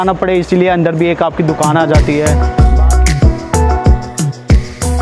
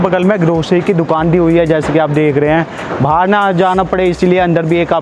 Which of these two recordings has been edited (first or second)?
first